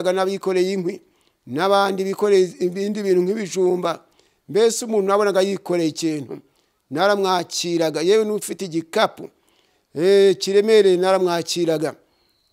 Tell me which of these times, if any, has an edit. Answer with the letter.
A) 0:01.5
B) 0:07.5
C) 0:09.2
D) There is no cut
D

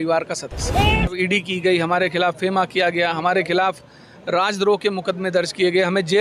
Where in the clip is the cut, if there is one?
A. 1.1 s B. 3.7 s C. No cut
A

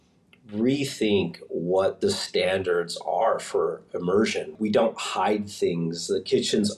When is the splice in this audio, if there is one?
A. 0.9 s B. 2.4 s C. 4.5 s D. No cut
C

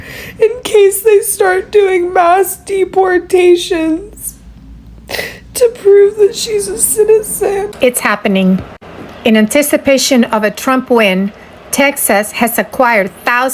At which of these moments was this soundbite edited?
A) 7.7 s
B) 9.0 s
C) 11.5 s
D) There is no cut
A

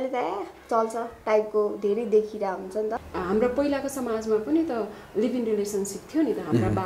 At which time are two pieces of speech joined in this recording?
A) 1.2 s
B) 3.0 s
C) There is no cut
B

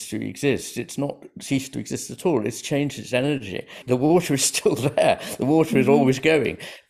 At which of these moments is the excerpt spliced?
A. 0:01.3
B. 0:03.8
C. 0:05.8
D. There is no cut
B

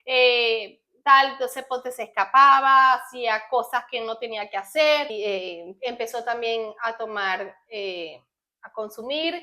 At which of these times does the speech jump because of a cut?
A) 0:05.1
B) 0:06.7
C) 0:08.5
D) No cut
A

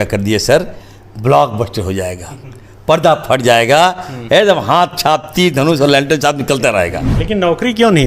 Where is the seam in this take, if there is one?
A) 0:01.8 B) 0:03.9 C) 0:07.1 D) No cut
C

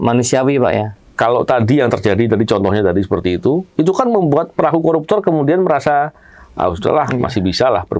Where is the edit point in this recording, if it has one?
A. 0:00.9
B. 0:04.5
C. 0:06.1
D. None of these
A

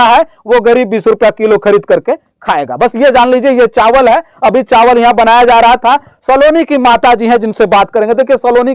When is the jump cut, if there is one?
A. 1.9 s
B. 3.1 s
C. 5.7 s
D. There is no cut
D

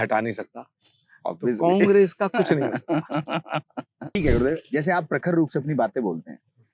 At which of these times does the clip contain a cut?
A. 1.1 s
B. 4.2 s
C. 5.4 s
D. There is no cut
B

